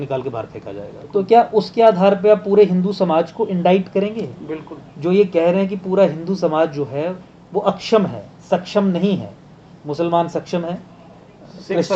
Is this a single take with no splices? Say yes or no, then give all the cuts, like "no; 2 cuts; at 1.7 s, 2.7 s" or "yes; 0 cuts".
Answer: no; 1 cut; at 1.0 s